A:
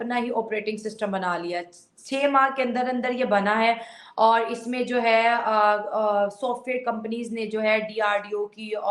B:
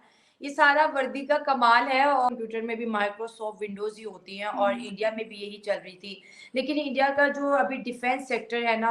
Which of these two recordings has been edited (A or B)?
B